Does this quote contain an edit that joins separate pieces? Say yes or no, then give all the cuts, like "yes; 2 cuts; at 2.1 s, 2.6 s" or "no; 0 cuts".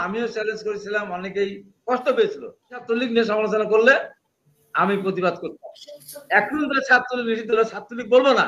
yes; 1 cut; at 2.9 s